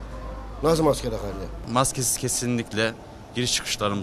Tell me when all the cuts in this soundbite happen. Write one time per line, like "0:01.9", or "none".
0:01.6